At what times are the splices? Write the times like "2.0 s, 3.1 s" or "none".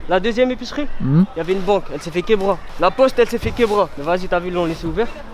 2.7 s, 4.0 s